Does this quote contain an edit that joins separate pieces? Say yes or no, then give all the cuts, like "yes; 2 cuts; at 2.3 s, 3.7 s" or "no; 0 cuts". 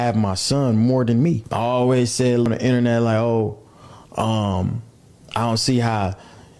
yes; 2 cuts; at 1.5 s, 2.5 s